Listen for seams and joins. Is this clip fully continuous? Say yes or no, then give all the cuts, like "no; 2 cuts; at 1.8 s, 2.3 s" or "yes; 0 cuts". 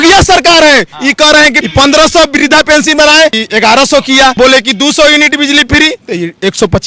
no; 3 cuts; at 1.6 s, 3.4 s, 4.4 s